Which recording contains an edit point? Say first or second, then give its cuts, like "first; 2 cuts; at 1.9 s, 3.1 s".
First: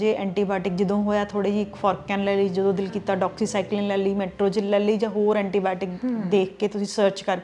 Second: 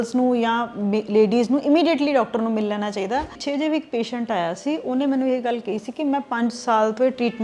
second; 1 cut; at 3.4 s